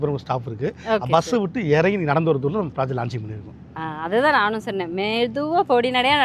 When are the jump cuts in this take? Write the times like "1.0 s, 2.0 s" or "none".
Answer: none